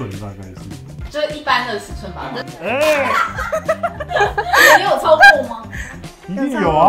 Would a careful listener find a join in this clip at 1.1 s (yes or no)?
yes